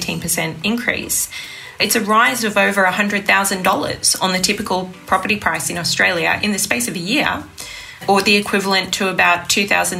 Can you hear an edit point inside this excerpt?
yes; 3 cuts; at 1.8 s, 6.4 s, 8.0 s

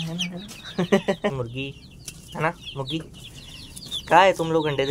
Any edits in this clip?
yes; 1 cut; at 1.3 s

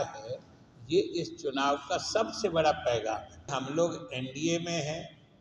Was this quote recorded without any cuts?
no; 1 cut; at 3.5 s

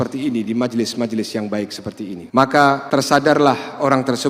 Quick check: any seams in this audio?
yes; 2 cuts; at 2.2 s, 2.8 s

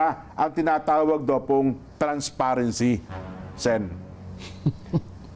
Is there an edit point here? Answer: no; 0 cuts

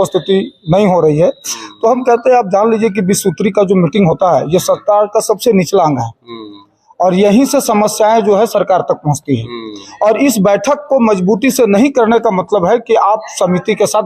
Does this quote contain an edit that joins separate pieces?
no; 0 cuts

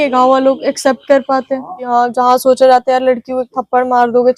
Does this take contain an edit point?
yes; 1 cut; at 1.8 s

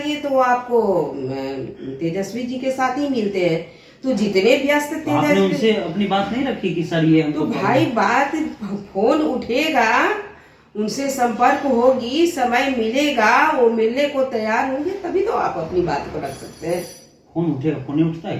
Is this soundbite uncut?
yes; 0 cuts

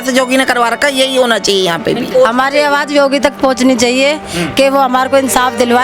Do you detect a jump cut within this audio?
yes; 1 cut; at 2.1 s

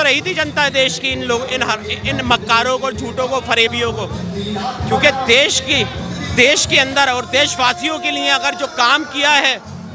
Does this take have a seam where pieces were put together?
no; 0 cuts

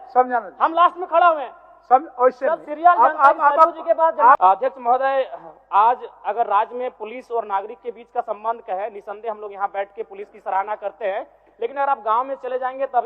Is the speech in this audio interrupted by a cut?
yes; 1 cut; at 4.4 s

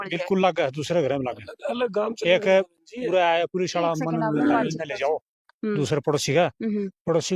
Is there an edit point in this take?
no; 0 cuts

